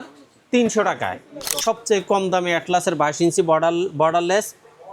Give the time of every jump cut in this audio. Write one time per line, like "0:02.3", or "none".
0:01.5